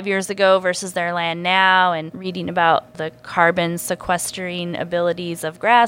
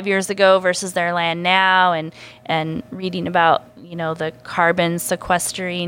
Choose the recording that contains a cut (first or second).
first